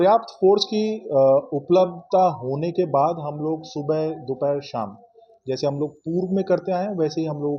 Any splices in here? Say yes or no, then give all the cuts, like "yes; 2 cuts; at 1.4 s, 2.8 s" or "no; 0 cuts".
no; 0 cuts